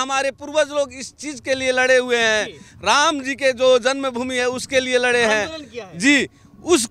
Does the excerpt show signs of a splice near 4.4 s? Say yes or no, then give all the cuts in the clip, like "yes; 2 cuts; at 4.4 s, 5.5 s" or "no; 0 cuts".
no; 0 cuts